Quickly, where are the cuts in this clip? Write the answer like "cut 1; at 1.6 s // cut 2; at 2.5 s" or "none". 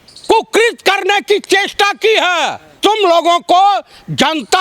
cut 1; at 2.7 s